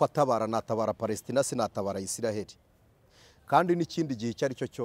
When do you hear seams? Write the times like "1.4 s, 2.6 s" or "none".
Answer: none